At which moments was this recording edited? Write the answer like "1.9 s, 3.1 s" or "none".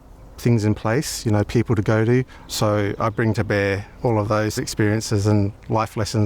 2.5 s, 4.4 s